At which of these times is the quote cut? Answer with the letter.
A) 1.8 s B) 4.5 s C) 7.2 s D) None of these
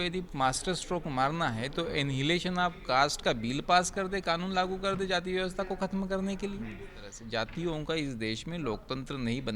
C